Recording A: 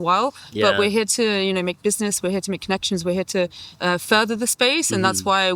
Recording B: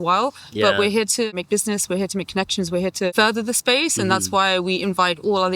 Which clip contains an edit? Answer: B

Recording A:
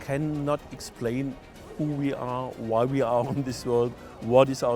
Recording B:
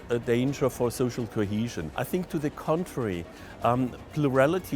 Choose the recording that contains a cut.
B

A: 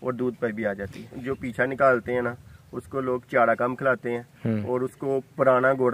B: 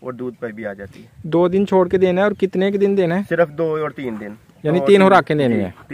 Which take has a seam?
A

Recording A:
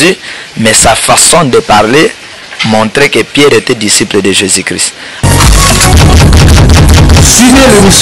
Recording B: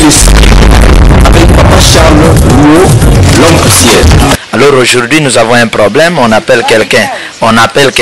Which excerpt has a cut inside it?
B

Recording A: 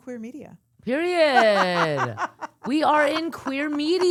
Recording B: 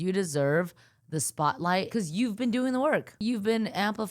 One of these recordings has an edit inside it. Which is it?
B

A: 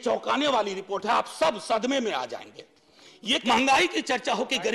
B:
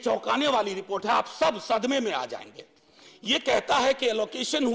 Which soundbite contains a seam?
A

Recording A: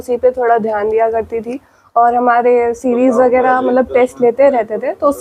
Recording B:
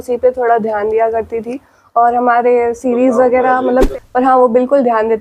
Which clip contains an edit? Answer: B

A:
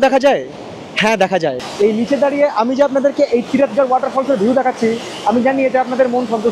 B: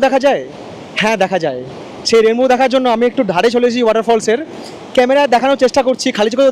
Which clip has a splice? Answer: A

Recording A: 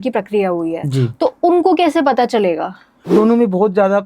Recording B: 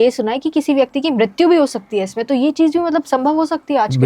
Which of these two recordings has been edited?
A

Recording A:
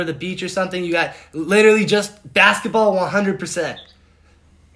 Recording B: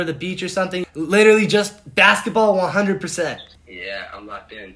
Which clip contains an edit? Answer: B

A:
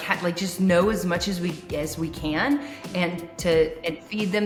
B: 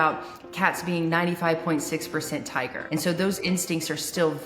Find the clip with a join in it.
B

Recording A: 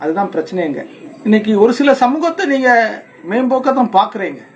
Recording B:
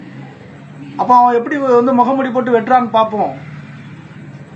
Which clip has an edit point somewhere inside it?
A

